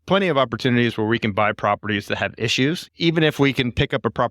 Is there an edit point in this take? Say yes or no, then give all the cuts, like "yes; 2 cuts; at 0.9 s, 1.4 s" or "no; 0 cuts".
yes; 1 cut; at 2.9 s